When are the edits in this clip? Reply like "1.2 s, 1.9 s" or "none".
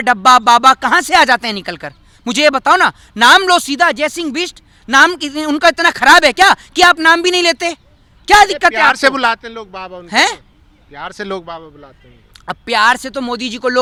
none